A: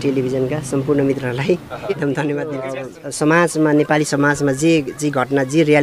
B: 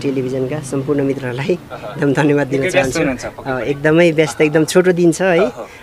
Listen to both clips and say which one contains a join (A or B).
A